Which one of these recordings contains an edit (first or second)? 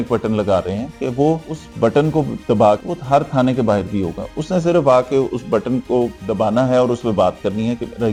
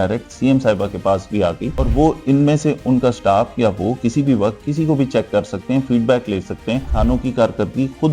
second